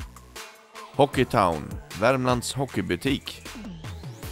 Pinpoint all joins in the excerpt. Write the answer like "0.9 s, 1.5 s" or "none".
3.3 s